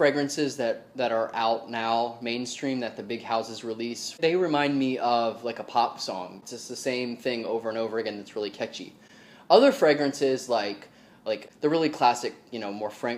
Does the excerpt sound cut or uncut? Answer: cut